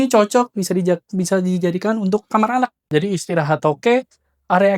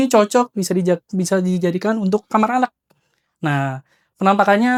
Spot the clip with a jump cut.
first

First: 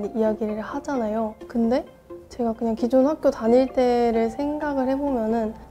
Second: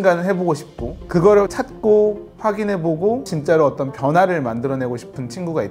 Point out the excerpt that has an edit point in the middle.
second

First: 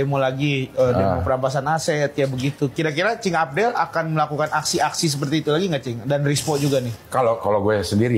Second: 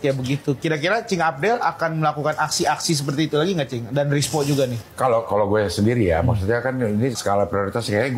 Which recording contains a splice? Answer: second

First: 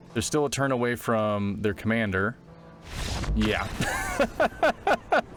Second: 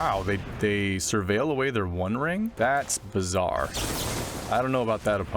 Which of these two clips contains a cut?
second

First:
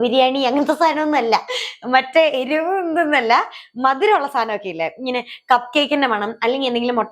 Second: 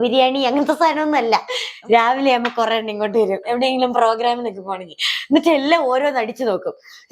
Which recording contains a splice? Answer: second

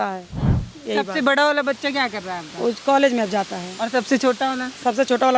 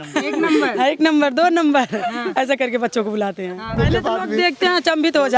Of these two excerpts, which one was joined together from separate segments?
second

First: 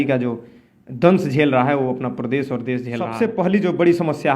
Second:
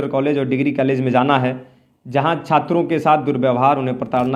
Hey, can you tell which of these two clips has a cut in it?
first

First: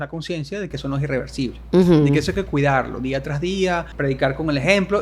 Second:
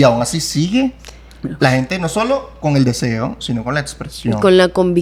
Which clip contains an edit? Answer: first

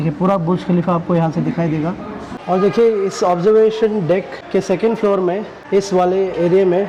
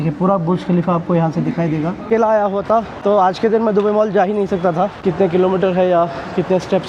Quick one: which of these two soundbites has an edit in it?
second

